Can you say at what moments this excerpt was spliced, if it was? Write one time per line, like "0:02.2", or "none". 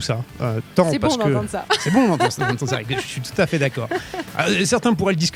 none